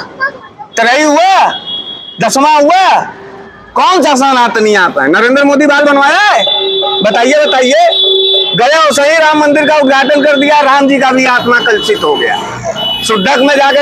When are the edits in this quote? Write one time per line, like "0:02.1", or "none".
none